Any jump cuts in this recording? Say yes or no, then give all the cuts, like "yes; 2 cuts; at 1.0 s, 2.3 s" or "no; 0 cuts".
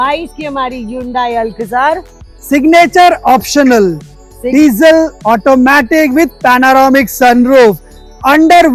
no; 0 cuts